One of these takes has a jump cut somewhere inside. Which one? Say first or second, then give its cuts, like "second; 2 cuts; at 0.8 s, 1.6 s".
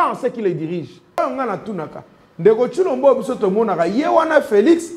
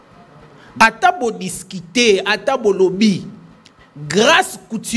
first; 1 cut; at 1.2 s